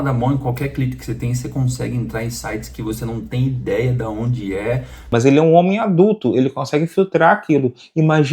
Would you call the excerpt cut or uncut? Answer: cut